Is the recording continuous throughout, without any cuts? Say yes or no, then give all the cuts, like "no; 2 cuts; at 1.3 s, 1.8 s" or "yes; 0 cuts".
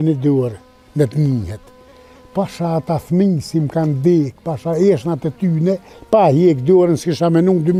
yes; 0 cuts